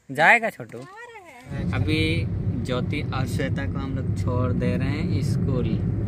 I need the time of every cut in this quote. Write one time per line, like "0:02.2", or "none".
0:01.5